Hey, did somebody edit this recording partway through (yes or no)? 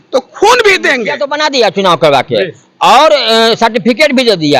yes